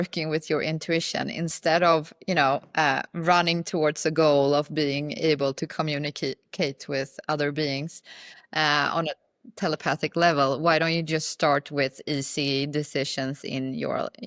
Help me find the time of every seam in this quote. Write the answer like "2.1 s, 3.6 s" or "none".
none